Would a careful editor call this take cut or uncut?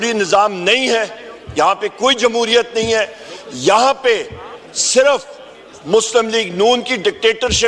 uncut